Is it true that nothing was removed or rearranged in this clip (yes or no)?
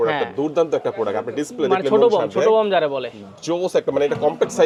yes